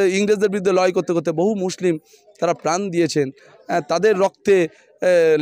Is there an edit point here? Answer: no; 0 cuts

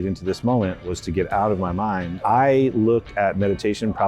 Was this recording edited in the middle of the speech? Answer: yes; 1 cut; at 2.1 s

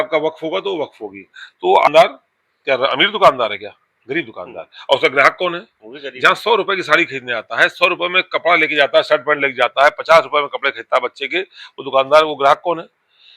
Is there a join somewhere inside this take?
yes; 1 cut; at 1.9 s

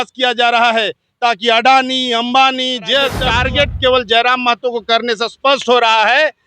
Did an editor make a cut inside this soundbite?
yes; 1 cut; at 3.2 s

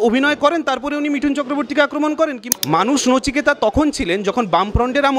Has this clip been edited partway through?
yes; 1 cut; at 2.4 s

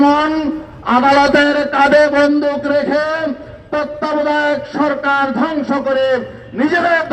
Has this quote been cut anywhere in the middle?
no; 0 cuts

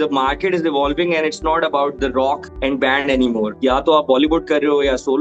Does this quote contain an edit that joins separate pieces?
yes; 2 cuts; at 2.5 s, 3.5 s

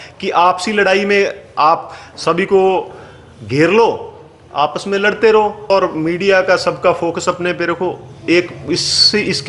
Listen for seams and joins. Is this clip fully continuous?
no; 1 cut; at 5.7 s

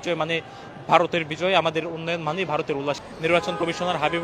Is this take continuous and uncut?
no; 1 cut; at 3.0 s

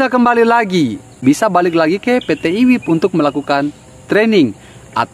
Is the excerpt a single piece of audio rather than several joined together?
no; 1 cut; at 1.1 s

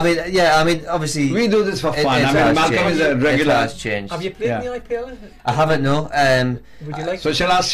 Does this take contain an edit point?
yes; 1 cut; at 2.5 s

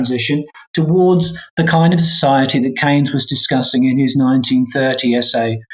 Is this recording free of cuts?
yes; 0 cuts

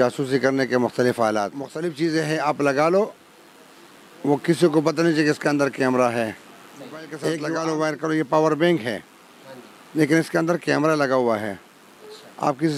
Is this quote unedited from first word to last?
no; 2 cuts; at 1.8 s, 7.3 s

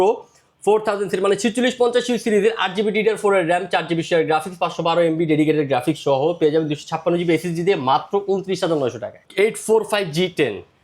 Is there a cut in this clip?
yes; 1 cut; at 9.2 s

